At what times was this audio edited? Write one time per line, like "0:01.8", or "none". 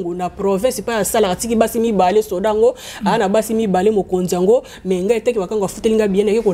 none